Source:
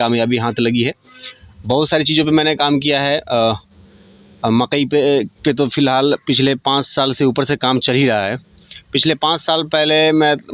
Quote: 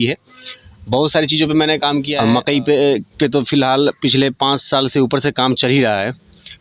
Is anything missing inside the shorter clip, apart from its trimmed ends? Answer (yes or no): yes